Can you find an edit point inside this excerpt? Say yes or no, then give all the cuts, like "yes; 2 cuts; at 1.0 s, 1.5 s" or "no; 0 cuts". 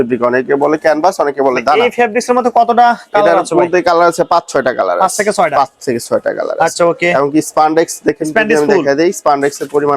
no; 0 cuts